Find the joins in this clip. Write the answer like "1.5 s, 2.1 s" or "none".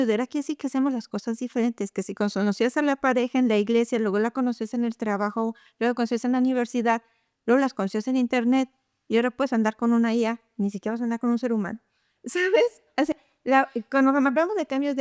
none

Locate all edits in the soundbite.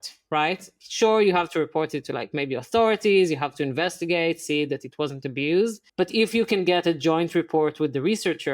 5.8 s

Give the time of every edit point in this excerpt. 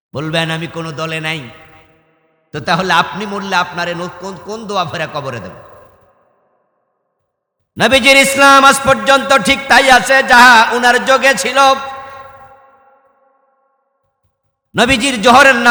none

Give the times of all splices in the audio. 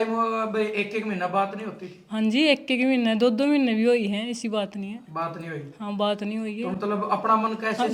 none

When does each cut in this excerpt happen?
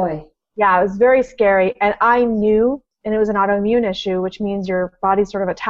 2.9 s

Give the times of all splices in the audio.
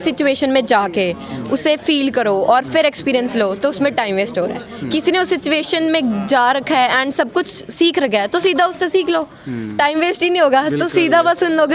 none

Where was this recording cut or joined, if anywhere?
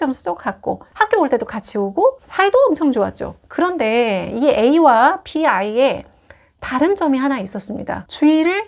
none

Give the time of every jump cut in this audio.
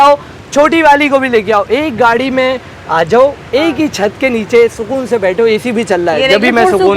none

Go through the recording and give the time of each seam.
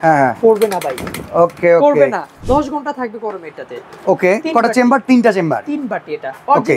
2.4 s

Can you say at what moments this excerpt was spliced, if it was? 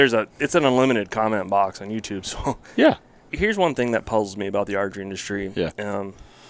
3.3 s

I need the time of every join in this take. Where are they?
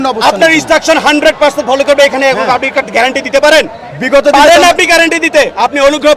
none

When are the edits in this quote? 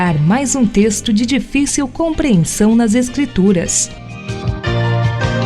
3.8 s

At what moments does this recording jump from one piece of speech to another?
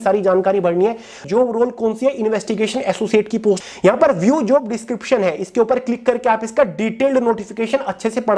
1.3 s, 3.6 s

